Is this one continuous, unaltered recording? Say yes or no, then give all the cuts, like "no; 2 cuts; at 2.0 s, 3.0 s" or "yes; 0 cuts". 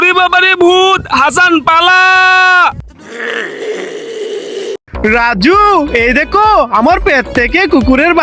no; 1 cut; at 4.8 s